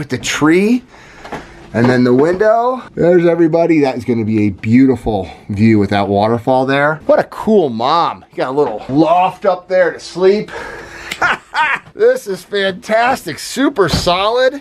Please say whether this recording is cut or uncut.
uncut